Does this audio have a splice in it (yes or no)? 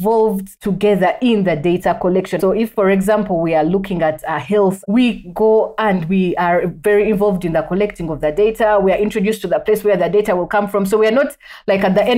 yes